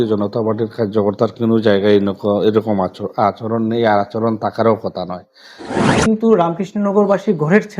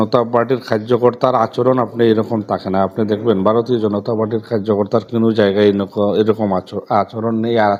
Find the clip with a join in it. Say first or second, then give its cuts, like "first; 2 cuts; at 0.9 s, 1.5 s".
first; 1 cut; at 6.0 s